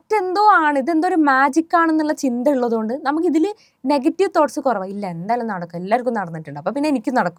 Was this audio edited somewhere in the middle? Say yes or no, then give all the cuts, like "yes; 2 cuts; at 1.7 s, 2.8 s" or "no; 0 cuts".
no; 0 cuts